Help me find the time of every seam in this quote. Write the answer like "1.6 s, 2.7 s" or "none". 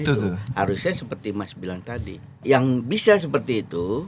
2.4 s